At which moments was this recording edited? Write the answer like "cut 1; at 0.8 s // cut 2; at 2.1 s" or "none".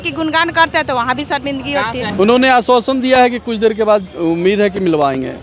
cut 1; at 2.1 s